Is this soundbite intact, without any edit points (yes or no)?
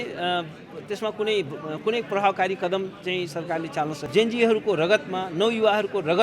no